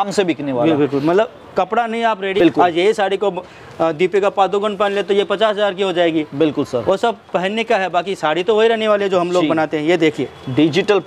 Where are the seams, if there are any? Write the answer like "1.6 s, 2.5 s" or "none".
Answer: 2.3 s